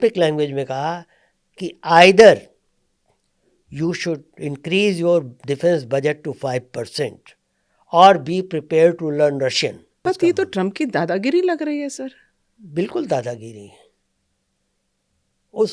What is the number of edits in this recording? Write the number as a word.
one